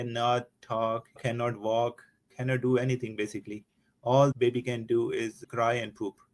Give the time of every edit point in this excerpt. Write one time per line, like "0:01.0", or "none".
none

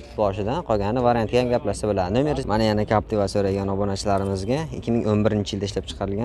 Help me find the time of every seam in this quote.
0:02.4

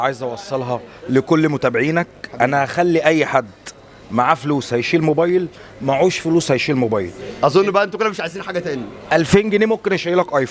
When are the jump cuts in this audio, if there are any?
none

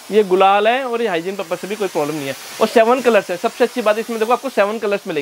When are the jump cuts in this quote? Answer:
none

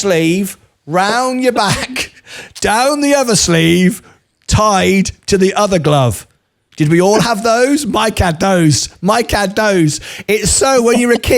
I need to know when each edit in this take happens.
none

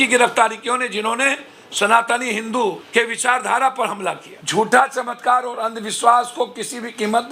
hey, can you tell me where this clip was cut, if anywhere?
0:02.8
0:04.3

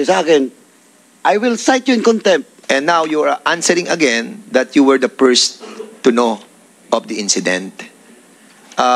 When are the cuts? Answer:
0:02.5

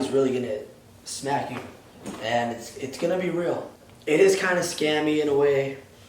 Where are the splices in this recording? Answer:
0:01.9
0:03.8

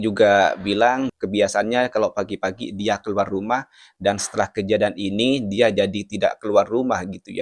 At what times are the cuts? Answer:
0:01.1

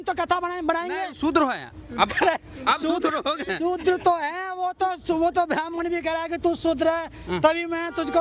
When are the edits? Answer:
none

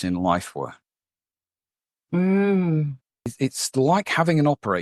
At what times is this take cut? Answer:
0:03.2

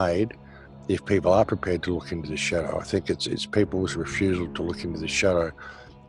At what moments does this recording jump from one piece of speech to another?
none

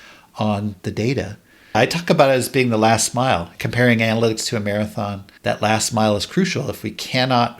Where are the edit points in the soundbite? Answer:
0:01.7
0:03.6
0:05.2

